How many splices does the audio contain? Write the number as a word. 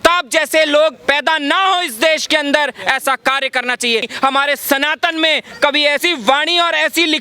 two